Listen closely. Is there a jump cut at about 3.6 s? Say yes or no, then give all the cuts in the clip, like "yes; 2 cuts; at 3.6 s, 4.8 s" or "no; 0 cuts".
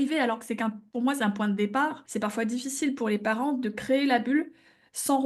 no; 1 cut; at 2.0 s